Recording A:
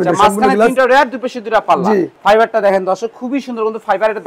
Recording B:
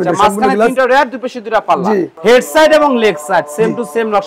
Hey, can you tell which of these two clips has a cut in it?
B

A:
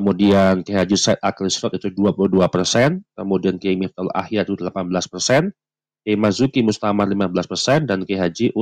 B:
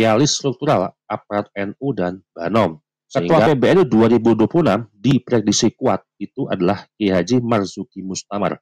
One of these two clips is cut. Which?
B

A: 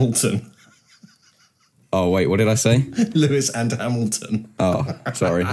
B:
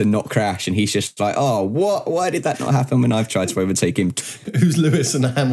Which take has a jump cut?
B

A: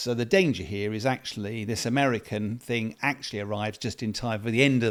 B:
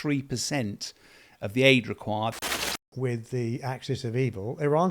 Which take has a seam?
B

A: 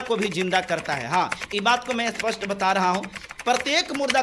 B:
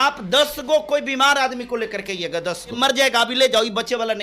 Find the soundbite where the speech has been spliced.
B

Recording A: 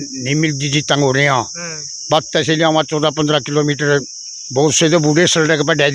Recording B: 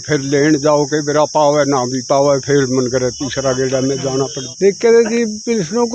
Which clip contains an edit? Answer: B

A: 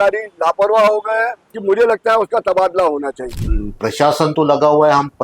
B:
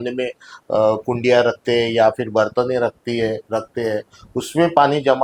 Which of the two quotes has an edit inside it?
A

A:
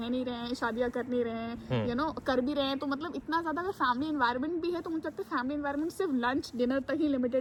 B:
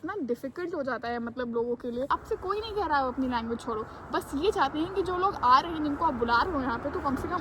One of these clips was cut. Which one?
B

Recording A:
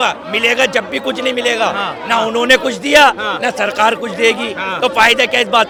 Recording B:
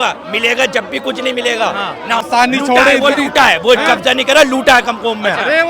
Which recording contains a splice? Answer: B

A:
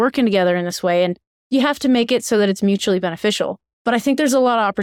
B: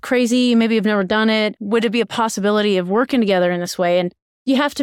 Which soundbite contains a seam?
A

